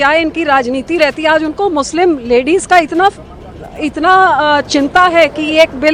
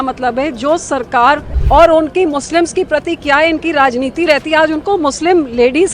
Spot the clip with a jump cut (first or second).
second